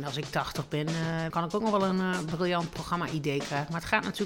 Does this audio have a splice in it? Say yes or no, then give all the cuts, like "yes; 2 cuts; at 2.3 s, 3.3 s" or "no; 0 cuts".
yes; 1 cut; at 1.3 s